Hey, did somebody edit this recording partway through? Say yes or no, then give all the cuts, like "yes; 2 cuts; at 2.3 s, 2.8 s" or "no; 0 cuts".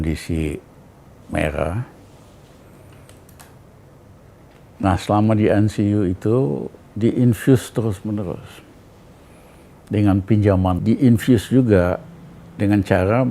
yes; 1 cut; at 10.8 s